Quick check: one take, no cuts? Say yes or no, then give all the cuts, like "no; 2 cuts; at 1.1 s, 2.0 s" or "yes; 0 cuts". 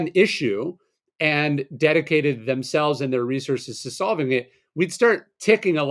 yes; 0 cuts